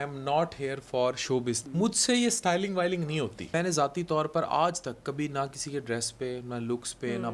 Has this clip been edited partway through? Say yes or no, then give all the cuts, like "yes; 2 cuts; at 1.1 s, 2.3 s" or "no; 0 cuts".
yes; 2 cuts; at 1.6 s, 3.5 s